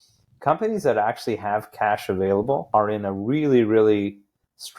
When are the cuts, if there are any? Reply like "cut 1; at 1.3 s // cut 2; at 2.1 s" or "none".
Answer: cut 1; at 2.6 s